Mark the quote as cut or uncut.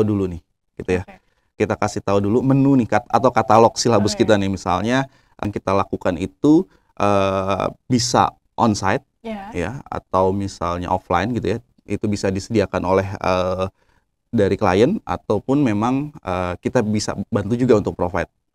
cut